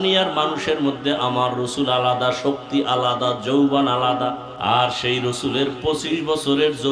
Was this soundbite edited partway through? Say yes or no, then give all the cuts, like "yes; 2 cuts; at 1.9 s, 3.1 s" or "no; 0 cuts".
yes; 1 cut; at 4.5 s